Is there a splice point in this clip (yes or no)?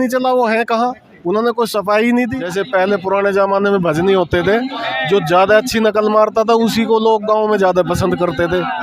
yes